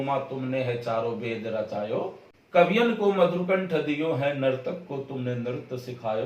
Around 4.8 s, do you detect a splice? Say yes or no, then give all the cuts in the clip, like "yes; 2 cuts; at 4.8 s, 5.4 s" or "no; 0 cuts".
no; 1 cut; at 2.3 s